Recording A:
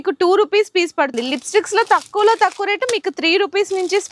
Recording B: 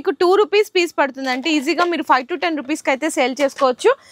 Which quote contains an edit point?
A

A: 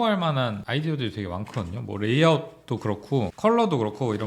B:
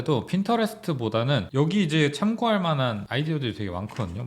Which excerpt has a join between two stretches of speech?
B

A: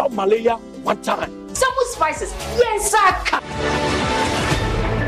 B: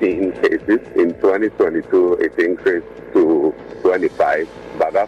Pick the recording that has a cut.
B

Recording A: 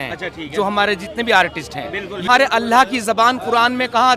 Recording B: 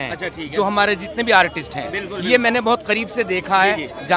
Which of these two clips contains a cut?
A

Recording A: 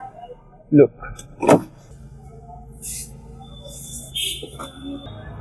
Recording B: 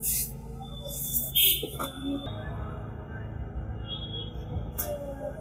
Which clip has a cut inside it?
A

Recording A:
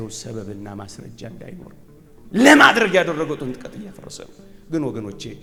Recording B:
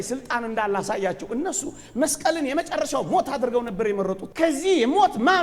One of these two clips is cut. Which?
B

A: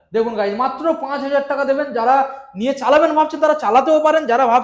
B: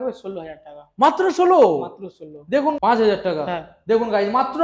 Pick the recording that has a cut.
B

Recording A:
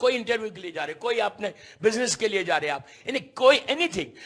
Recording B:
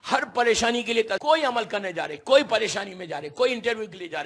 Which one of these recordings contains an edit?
B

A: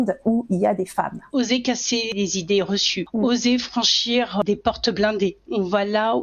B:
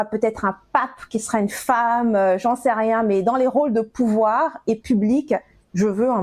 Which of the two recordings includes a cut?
A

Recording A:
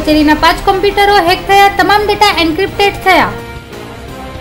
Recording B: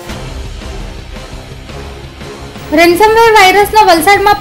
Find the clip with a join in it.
B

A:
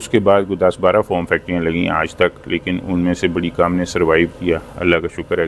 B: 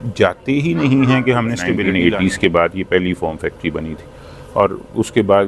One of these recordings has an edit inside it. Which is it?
B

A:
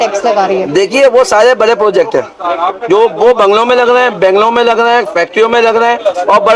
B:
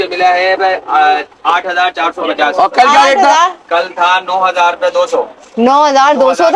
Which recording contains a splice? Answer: A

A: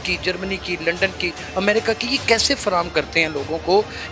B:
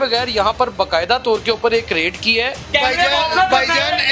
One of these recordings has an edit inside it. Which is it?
B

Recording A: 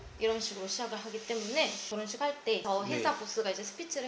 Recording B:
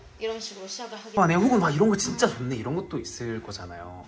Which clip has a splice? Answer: B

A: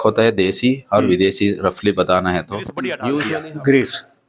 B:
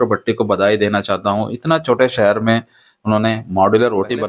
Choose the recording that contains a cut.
A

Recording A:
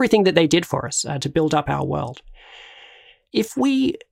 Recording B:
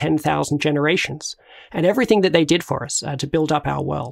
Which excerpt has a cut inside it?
A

